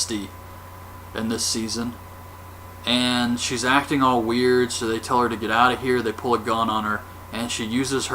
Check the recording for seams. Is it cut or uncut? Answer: cut